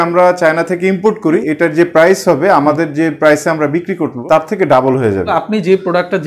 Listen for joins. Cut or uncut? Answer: cut